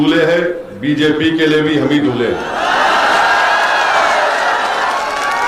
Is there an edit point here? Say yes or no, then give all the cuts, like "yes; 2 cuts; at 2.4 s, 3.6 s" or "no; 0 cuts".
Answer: no; 0 cuts